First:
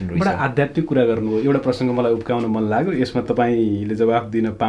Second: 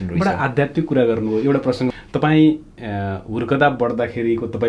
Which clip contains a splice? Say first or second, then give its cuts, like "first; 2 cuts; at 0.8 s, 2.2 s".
second; 1 cut; at 1.9 s